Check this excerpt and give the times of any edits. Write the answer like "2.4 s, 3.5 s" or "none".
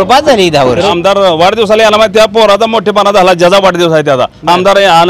0.9 s